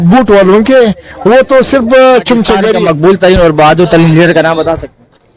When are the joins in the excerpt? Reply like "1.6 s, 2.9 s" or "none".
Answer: 2.8 s